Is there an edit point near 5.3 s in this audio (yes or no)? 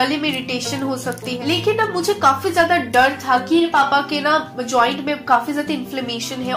no